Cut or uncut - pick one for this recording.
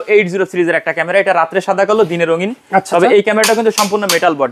uncut